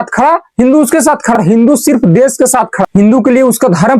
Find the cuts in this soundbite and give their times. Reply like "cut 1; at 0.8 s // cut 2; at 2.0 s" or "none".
cut 1; at 1.4 s

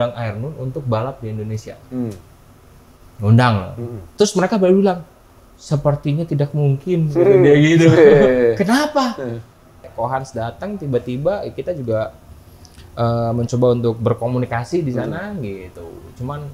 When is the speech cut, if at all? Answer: cut 1; at 9.9 s

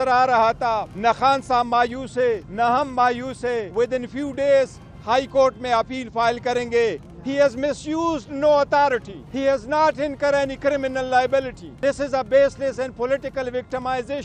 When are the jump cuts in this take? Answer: cut 1; at 0.9 s // cut 2; at 2.5 s // cut 3; at 3.7 s // cut 4; at 7.1 s // cut 5; at 9.2 s // cut 6; at 11.6 s

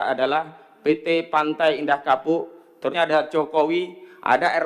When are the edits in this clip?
cut 1; at 2.9 s

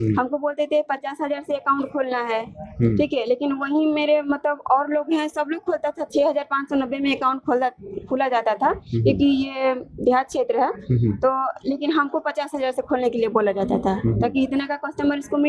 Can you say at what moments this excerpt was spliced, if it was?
none

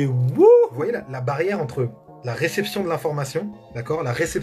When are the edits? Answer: cut 1; at 1.0 s

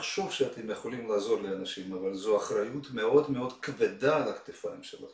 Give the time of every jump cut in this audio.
none

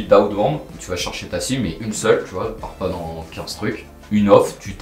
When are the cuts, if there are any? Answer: none

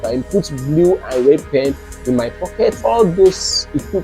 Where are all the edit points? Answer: cut 1; at 2.8 s

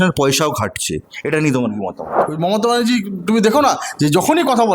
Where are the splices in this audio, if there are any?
cut 1; at 2.2 s

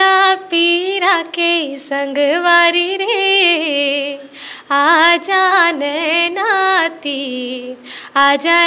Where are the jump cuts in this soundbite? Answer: none

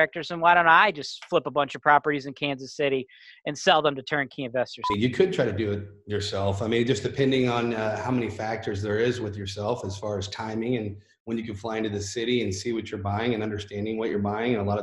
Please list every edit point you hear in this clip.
cut 1; at 4.9 s

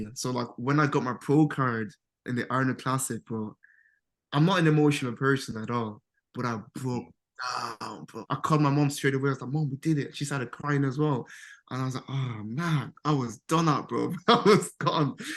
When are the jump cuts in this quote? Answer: cut 1; at 8.2 s

